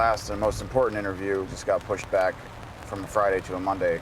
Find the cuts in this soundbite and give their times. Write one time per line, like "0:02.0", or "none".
0:01.5